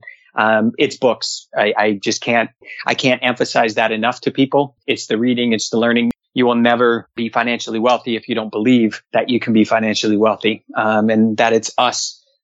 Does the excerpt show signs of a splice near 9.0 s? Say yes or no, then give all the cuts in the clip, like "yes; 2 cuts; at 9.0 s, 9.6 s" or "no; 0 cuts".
yes; 4 cuts; at 4.8 s, 6.1 s, 7.2 s, 9.0 s